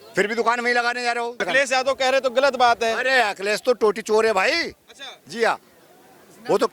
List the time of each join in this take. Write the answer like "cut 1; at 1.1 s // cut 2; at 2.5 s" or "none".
cut 1; at 1.4 s